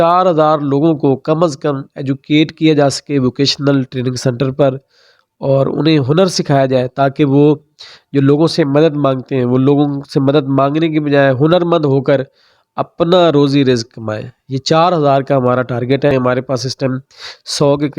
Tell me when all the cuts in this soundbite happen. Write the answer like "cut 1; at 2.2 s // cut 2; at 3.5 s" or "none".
cut 1; at 16.1 s